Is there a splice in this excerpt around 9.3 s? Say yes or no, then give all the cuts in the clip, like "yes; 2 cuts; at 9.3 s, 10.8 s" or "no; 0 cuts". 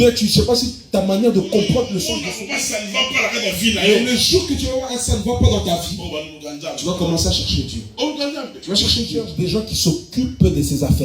yes; 2 cuts; at 2.1 s, 9.3 s